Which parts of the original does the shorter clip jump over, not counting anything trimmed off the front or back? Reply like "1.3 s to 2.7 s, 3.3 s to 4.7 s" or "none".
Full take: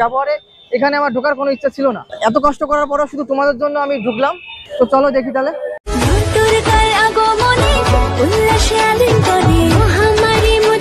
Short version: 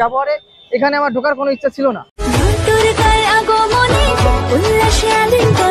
2.1 s to 5.8 s